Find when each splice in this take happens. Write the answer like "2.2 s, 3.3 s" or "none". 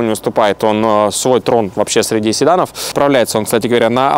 2.9 s